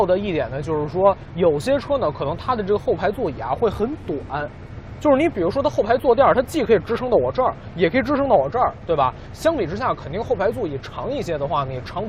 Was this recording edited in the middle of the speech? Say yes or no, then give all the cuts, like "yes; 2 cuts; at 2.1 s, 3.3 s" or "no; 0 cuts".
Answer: yes; 1 cut; at 10.0 s